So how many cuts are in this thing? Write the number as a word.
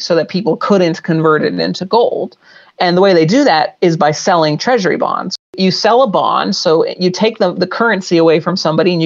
one